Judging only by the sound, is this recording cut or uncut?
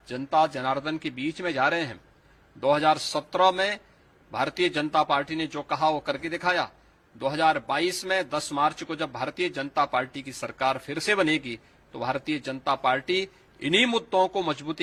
uncut